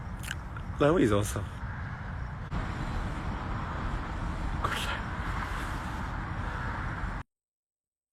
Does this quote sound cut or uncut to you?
uncut